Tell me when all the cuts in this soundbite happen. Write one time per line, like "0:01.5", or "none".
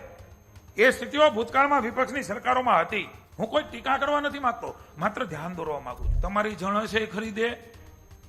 0:03.2
0:06.1